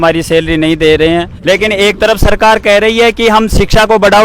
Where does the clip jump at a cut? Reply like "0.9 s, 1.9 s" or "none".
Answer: 1.3 s